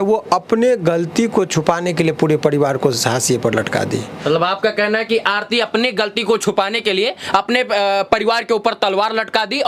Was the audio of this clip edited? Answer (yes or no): no